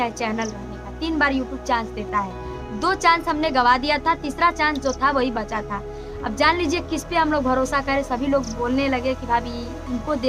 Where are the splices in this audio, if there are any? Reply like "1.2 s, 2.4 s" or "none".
none